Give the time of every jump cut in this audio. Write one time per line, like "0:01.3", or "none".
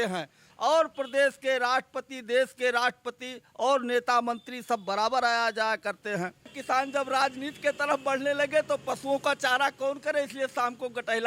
0:06.6